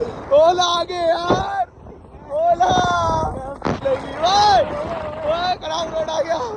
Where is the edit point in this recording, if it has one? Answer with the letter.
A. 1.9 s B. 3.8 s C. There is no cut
B